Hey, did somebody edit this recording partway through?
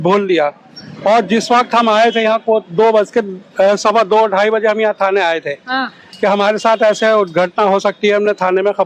no; 0 cuts

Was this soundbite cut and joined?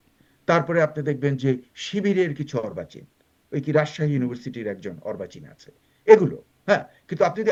no; 0 cuts

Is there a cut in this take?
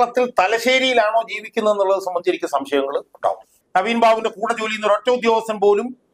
yes; 1 cut; at 3.6 s

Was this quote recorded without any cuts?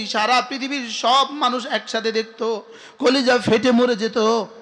yes; 0 cuts

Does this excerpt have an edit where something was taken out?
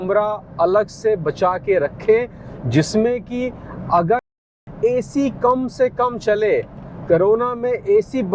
yes; 1 cut; at 4.5 s

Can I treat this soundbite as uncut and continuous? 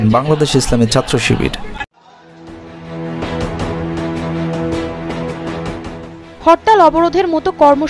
no; 1 cut; at 1.8 s

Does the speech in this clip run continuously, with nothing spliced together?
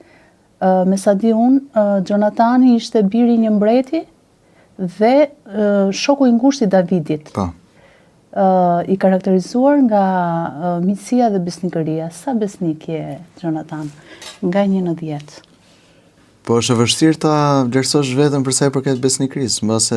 yes; 0 cuts

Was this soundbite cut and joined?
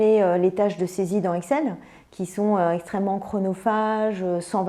no; 0 cuts

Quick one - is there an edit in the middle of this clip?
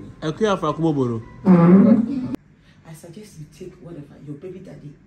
yes; 1 cut; at 2.3 s

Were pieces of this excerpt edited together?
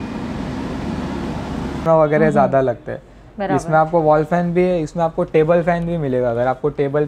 yes; 1 cut; at 1.8 s

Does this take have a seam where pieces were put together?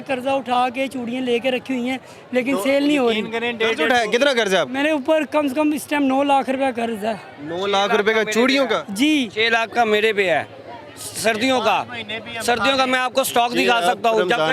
no; 0 cuts

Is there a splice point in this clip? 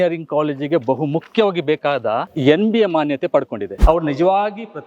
yes; 1 cut; at 3.6 s

